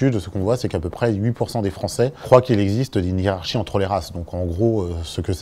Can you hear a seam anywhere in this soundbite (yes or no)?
no